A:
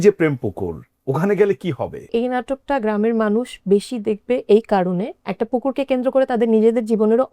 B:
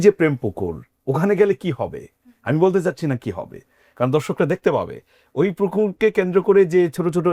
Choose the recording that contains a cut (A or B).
A